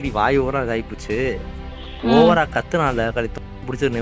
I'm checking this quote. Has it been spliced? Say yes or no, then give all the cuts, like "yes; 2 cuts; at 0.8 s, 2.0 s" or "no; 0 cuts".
no; 0 cuts